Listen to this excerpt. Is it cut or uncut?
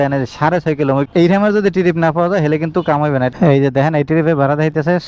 cut